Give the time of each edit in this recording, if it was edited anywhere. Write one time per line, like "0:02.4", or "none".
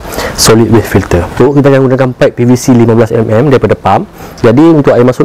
0:01.3